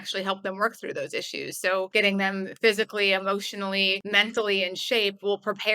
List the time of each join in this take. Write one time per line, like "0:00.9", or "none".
0:01.9
0:04.0